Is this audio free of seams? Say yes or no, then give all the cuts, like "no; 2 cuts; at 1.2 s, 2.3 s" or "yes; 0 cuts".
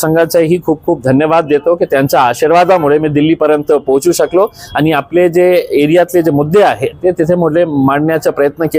yes; 0 cuts